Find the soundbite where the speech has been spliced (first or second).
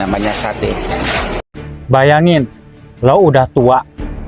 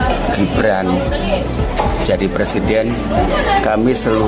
first